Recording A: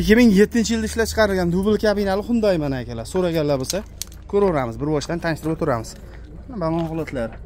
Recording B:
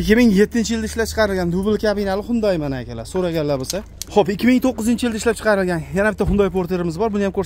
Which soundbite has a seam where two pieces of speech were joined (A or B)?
B